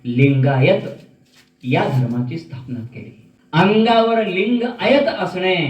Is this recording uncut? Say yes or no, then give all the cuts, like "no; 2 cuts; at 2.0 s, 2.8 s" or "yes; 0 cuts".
no; 1 cut; at 3.8 s